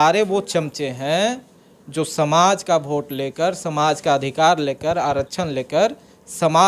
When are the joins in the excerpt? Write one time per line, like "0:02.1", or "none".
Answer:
none